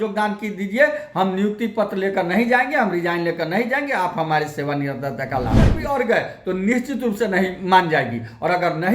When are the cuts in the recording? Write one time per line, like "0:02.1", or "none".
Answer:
0:05.8

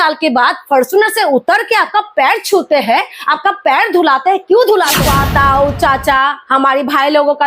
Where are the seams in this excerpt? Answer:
0:05.0

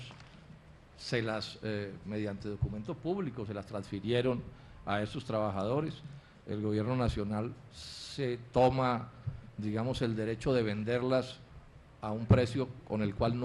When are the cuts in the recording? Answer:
0:07.4

